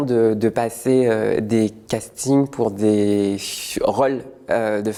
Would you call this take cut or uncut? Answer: uncut